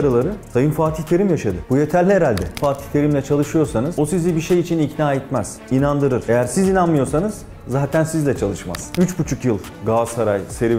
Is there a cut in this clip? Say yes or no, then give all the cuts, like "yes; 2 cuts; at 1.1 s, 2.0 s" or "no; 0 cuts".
yes; 4 cuts; at 2.6 s, 3.9 s, 5.9 s, 8.8 s